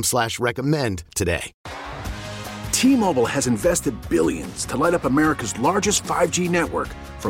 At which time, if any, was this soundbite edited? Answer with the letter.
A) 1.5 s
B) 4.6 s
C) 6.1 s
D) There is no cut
A